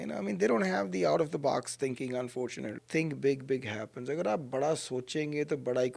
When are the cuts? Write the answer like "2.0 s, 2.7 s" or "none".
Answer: 2.8 s

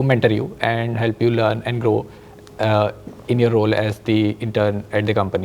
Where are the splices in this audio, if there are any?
none

